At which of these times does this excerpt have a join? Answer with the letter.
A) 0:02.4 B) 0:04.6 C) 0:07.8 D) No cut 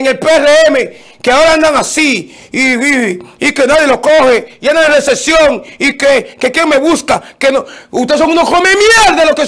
D